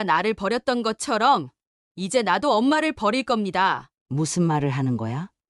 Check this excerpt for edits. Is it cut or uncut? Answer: cut